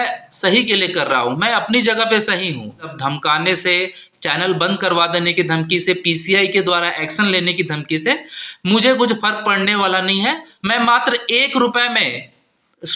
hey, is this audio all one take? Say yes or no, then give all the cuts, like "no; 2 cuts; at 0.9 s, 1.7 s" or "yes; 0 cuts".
no; 2 cuts; at 2.9 s, 10.5 s